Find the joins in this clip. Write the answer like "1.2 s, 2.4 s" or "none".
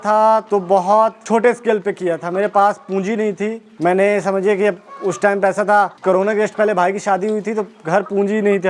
none